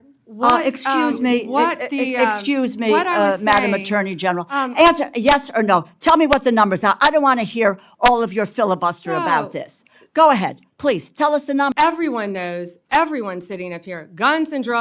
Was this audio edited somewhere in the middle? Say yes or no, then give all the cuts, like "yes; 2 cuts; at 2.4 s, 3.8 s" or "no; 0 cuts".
yes; 1 cut; at 11.7 s